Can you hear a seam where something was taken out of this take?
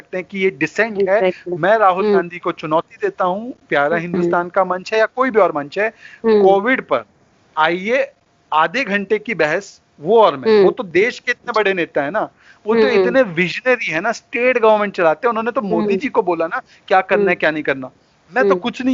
no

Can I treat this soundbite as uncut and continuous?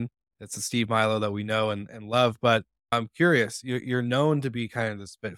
no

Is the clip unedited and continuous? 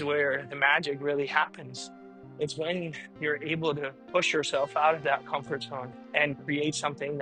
yes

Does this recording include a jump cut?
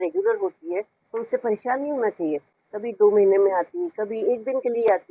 no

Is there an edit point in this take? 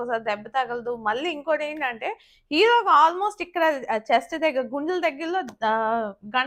no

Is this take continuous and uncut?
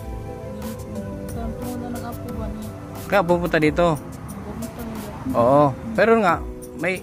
yes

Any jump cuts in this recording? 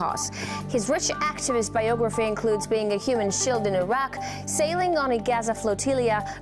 no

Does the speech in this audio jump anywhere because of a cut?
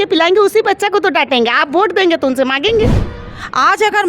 yes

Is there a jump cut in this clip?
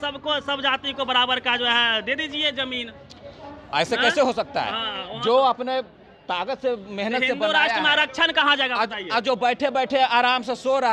no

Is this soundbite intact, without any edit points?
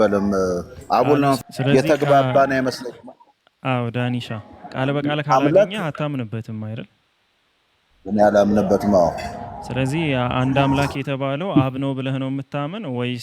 no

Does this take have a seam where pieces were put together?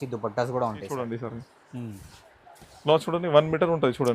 yes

